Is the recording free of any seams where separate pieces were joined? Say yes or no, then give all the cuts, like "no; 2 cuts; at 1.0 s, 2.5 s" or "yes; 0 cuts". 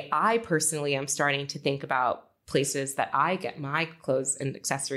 yes; 0 cuts